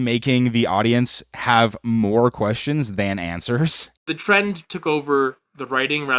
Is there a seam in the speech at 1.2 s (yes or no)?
no